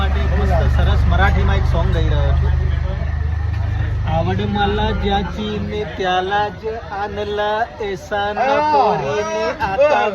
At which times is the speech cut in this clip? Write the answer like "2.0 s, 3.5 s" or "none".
none